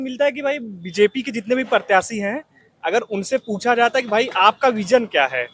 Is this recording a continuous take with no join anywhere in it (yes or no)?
yes